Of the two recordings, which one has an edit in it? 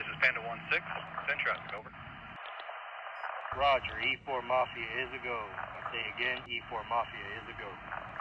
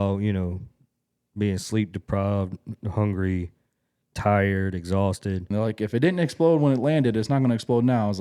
second; 1 cut; at 5.4 s

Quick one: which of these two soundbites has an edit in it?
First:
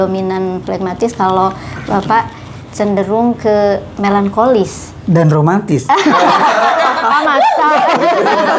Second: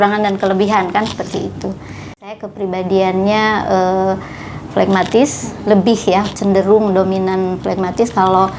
second; 1 cut; at 2.3 s

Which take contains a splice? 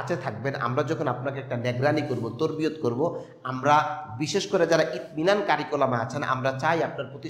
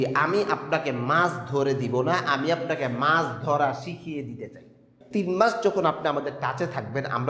second; 1 cut; at 4.9 s

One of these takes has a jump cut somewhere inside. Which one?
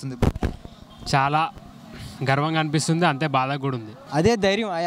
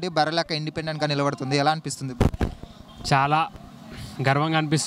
first; 1 cut; at 3.9 s

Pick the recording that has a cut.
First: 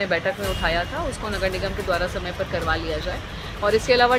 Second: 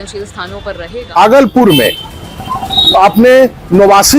second; 1 cut; at 1.1 s

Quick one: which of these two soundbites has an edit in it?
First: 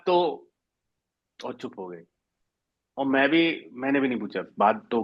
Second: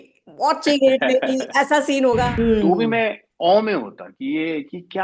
second; 1 cut; at 2.3 s

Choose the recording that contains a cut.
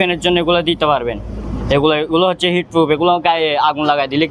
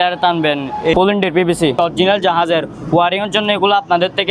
second; 2 cuts; at 0.9 s, 1.8 s

